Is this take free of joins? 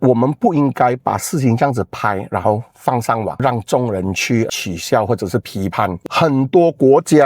no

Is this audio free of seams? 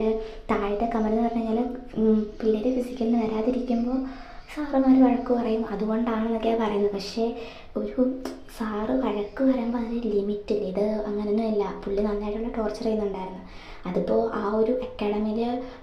yes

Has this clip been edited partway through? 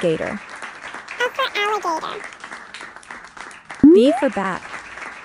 no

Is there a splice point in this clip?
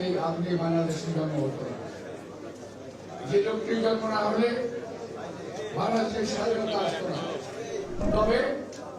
yes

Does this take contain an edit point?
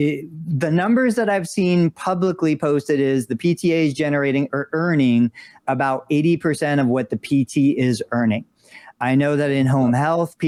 no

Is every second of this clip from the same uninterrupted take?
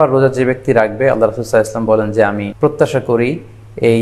no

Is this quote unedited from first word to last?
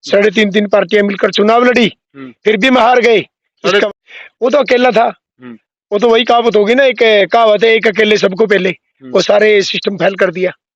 no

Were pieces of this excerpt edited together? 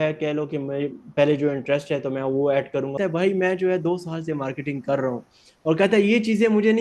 yes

